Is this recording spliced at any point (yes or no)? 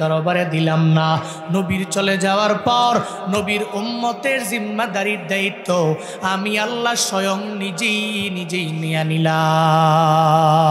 no